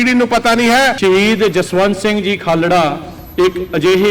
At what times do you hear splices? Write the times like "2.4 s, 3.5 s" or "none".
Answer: 1.0 s